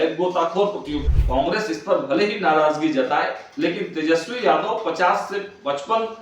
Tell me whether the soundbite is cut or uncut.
cut